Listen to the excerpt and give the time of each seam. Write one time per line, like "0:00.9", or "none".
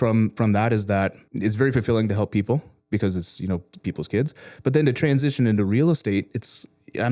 0:01.2